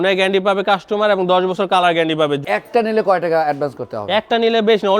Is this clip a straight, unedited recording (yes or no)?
no